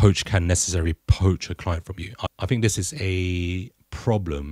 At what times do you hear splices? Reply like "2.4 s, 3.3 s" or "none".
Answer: 2.3 s